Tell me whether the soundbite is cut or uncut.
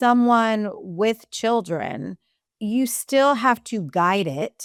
uncut